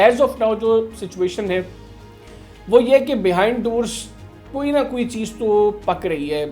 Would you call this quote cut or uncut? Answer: uncut